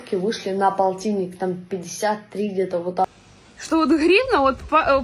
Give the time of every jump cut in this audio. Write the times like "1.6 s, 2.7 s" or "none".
3.1 s